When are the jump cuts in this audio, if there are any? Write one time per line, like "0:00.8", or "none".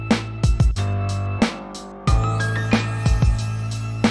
0:01.9